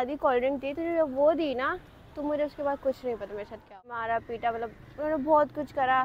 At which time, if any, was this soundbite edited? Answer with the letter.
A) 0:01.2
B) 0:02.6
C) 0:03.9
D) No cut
C